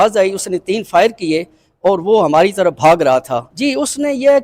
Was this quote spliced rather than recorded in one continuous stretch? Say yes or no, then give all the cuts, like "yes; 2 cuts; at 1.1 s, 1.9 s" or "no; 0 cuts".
yes; 1 cut; at 3.5 s